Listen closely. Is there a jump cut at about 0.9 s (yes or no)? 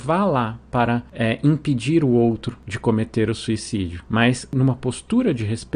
no